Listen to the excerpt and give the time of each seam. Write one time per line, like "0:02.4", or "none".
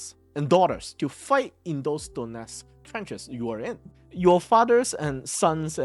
0:03.9